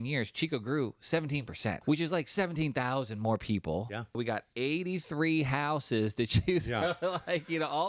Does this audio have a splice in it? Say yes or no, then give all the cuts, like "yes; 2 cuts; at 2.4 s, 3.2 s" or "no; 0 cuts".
yes; 2 cuts; at 1.8 s, 4.2 s